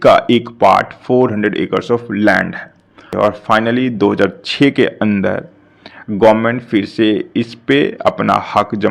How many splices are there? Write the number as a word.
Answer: one